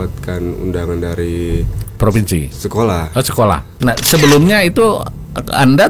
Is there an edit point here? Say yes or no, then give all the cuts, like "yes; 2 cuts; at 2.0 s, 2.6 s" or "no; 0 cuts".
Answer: yes; 1 cut; at 3.7 s